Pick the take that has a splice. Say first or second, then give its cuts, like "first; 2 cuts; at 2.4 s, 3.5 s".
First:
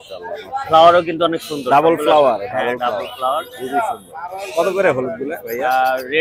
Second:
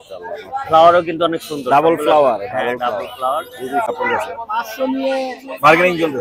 second; 1 cut; at 3.9 s